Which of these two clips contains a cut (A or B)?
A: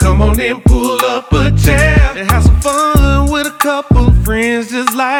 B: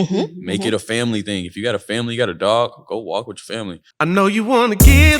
B